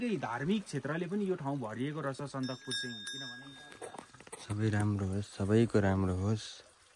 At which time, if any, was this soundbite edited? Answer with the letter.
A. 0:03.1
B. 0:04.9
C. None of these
A